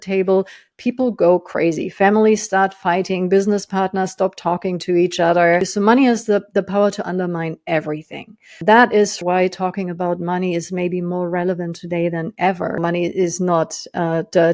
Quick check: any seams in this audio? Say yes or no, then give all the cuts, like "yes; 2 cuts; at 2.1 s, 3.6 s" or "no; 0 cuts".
yes; 4 cuts; at 5.7 s, 8.6 s, 9.2 s, 12.8 s